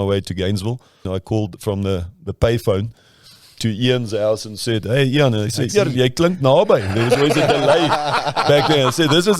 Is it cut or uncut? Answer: cut